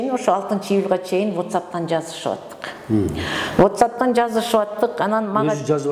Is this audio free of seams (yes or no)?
yes